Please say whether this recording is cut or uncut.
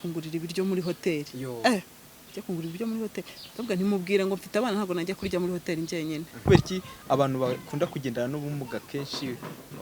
cut